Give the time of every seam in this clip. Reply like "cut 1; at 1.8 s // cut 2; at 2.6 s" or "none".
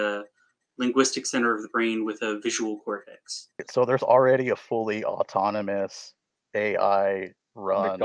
cut 1; at 3.6 s